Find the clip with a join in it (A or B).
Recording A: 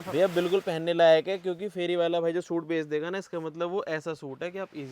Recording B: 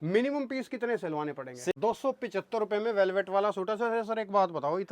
B